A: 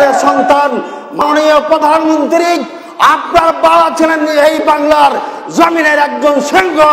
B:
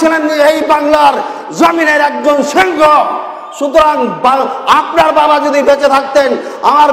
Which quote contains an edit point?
A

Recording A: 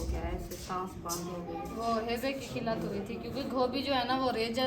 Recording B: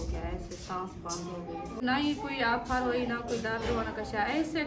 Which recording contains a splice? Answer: B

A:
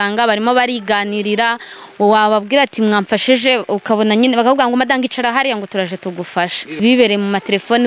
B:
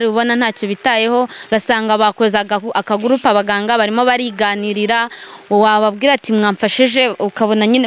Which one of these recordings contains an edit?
A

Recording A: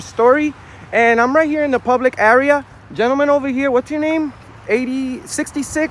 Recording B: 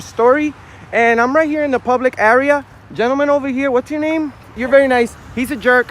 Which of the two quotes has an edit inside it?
B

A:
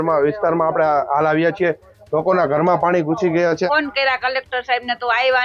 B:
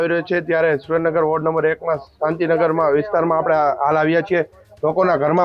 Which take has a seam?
A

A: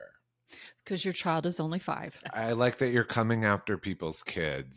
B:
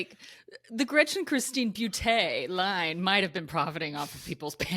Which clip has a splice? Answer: A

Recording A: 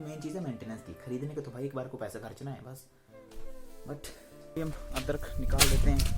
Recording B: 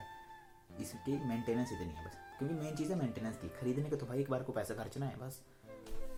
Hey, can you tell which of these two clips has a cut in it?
A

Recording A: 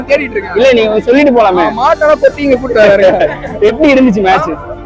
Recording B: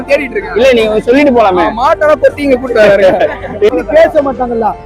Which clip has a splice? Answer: B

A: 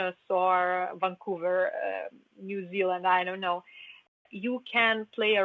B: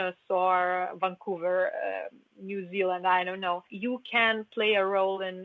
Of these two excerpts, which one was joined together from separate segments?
B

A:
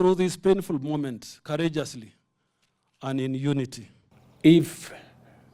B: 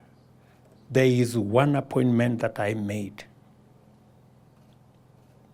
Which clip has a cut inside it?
A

